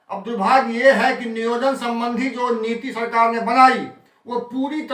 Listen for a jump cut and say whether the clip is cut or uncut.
uncut